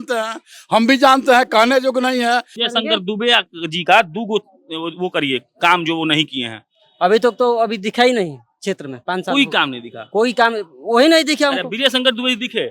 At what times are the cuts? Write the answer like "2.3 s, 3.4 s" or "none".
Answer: 2.6 s